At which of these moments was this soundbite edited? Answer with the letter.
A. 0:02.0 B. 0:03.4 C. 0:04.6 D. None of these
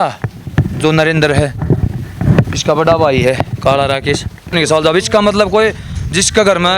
C